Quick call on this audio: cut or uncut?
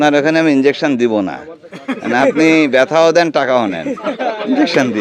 uncut